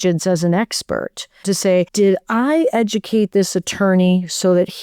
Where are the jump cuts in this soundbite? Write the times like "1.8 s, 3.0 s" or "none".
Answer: 1.6 s